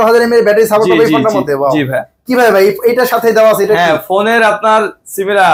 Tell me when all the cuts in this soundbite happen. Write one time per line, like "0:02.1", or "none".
none